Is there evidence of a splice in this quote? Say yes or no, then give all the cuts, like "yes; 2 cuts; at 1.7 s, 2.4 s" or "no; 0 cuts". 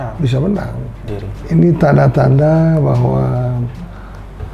yes; 1 cut; at 1.1 s